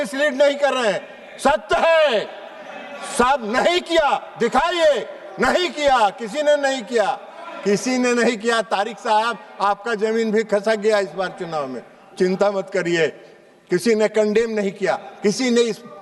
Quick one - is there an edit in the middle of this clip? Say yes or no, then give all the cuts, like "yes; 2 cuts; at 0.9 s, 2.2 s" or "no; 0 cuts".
no; 0 cuts